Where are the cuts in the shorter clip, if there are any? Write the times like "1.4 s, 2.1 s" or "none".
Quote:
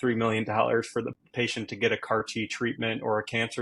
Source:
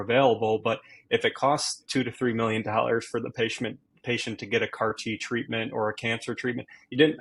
1.1 s